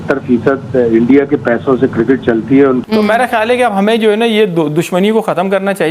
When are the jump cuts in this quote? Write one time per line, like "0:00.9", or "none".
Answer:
0:02.8